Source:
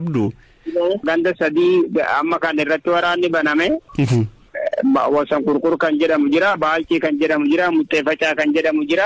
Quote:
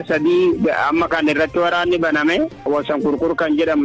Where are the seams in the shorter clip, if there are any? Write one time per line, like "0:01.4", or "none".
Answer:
0:02.6